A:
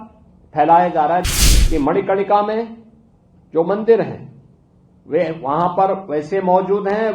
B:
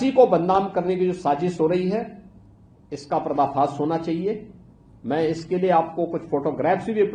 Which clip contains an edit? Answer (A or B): A